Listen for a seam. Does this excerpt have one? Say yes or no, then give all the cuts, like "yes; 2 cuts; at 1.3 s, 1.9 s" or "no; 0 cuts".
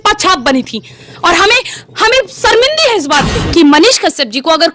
yes; 1 cut; at 3.4 s